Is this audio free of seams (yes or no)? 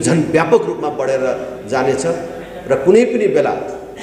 yes